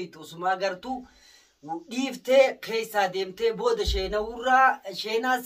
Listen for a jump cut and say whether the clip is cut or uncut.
uncut